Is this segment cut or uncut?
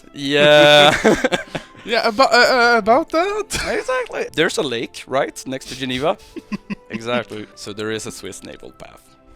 cut